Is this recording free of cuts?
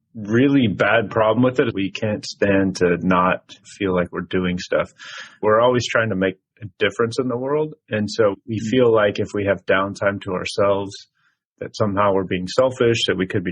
no; 3 cuts; at 1.7 s, 5.4 s, 8.3 s

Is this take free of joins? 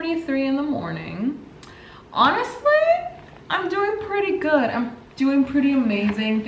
yes; 0 cuts

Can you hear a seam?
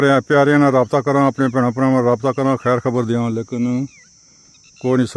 no; 0 cuts

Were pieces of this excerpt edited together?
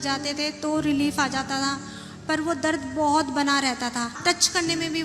yes; 1 cut; at 4.2 s

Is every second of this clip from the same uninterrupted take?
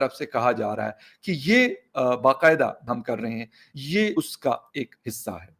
no; 1 cut; at 2.8 s

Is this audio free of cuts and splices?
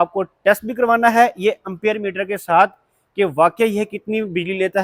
yes; 0 cuts

